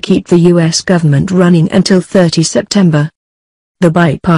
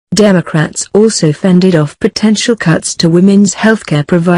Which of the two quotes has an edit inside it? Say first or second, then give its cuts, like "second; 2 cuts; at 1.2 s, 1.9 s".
first; 1 cut; at 3.1 s